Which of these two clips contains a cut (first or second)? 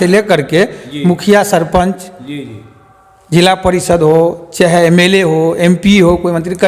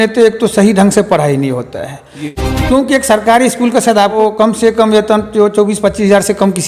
second